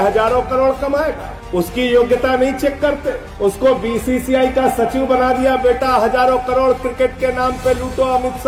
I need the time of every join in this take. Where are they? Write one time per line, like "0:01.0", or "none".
none